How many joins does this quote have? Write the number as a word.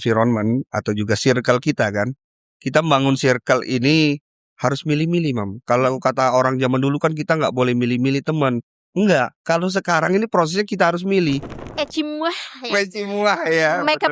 one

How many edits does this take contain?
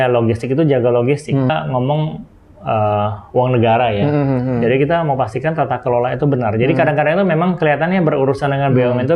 one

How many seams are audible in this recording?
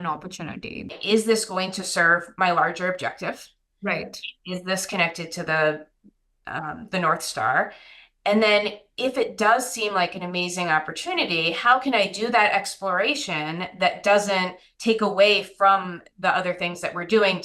one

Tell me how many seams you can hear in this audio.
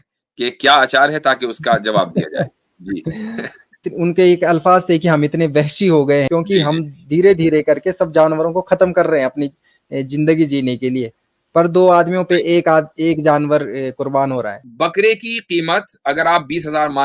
three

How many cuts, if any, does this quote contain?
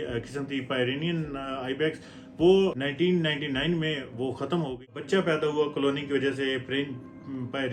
one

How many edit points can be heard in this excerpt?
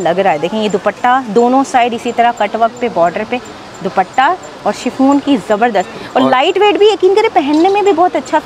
zero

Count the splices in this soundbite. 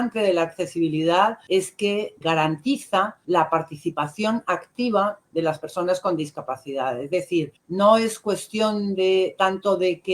three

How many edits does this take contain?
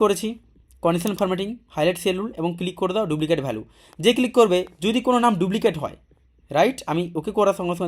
zero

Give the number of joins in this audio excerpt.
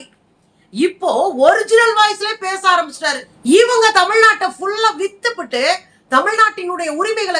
one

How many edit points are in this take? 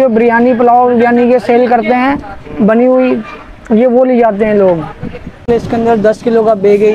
one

